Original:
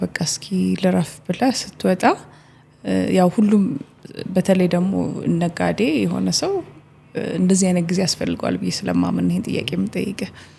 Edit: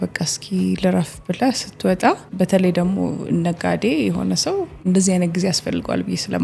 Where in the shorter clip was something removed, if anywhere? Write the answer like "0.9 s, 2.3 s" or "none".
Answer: 2.3 s, 4.8 s